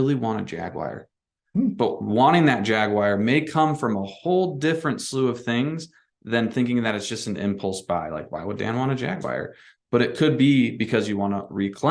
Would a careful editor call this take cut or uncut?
uncut